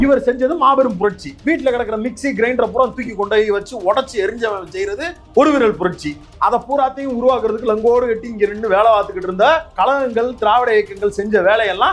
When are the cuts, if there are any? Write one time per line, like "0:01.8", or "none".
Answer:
0:01.3
0:09.7